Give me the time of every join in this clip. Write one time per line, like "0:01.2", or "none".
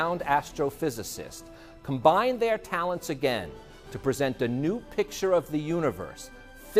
0:05.4